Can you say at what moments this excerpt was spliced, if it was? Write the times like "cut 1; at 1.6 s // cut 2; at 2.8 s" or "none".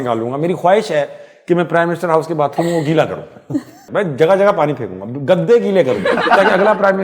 cut 1; at 3.8 s // cut 2; at 6.3 s